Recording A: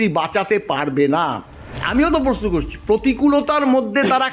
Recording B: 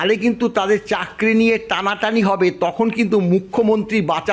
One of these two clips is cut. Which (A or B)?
A